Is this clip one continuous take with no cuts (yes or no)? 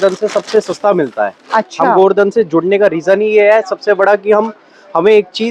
yes